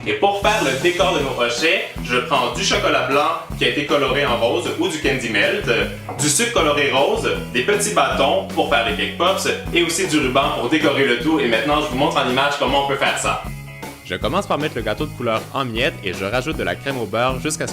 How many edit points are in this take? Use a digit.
1